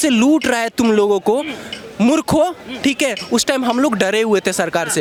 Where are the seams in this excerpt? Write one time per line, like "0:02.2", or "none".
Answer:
none

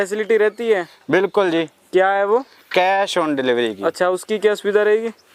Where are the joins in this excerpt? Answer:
none

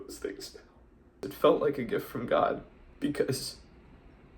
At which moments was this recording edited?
0:01.2
0:02.8

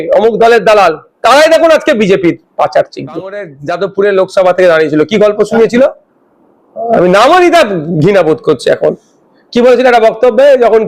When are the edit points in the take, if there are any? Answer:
0:03.6

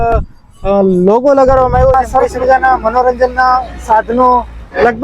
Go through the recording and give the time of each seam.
0:01.9

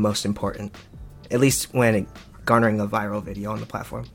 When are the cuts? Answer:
none

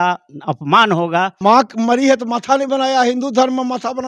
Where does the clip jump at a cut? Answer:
0:01.3

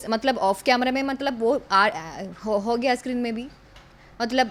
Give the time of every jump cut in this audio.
none

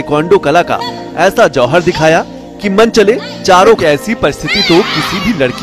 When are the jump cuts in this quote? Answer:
0:03.8

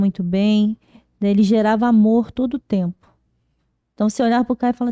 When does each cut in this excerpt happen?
none

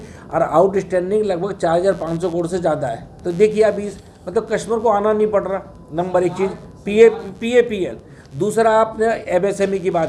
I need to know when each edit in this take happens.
none

